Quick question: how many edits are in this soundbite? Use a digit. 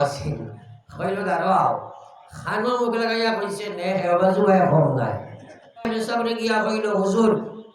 1